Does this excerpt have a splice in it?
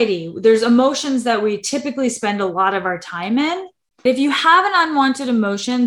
yes; 1 cut; at 4.1 s

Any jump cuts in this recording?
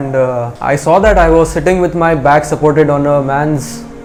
no; 0 cuts

